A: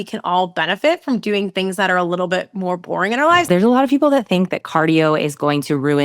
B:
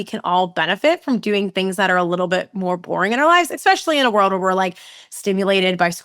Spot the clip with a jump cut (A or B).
A